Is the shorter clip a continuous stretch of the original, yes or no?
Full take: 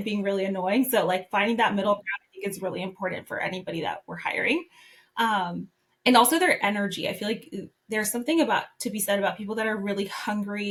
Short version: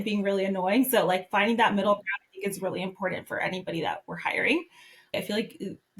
no